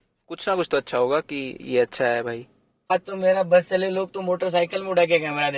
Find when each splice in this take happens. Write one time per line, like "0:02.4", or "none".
0:02.9